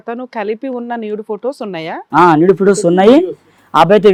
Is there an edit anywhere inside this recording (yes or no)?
no